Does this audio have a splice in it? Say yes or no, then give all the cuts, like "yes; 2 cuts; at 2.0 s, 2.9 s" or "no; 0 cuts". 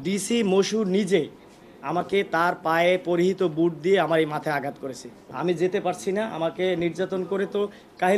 yes; 1 cut; at 5.1 s